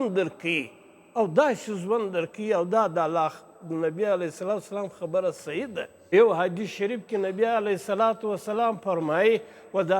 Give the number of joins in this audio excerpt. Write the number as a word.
one